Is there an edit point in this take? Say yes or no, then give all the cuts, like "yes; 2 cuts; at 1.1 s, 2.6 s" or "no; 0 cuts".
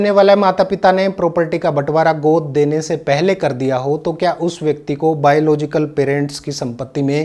no; 0 cuts